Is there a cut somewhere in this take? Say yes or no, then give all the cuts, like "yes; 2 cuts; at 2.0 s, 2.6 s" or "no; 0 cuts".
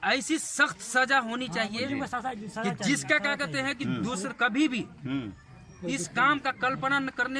no; 0 cuts